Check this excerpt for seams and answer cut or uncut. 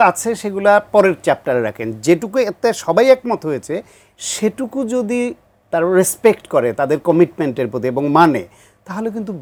uncut